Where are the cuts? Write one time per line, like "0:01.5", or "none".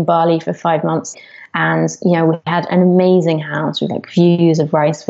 0:01.1
0:02.4